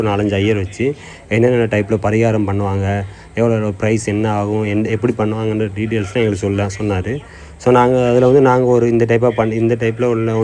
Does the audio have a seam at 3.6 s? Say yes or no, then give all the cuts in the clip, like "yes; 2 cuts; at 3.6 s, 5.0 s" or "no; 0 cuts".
no; 0 cuts